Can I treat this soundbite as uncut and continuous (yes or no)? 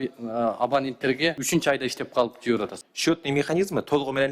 no